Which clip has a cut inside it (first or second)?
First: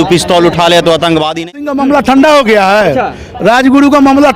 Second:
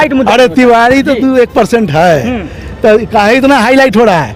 first